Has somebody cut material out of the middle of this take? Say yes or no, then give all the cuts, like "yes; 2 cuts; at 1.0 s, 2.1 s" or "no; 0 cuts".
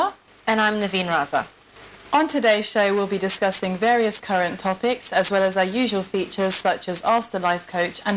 yes; 1 cut; at 5.1 s